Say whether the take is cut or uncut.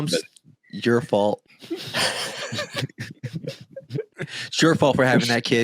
cut